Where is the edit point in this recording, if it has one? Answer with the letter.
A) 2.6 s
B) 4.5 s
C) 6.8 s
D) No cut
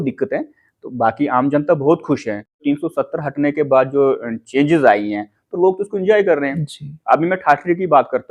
A